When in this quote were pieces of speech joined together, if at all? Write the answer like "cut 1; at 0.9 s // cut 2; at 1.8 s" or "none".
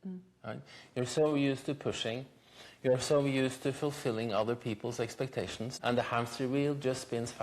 cut 1; at 5.7 s